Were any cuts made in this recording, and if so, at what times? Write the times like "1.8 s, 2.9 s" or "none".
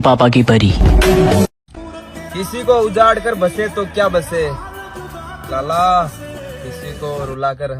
1.8 s